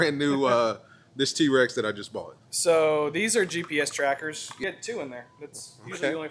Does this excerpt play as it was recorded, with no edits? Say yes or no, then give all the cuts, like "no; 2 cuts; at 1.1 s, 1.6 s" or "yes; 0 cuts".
no; 1 cut; at 4.5 s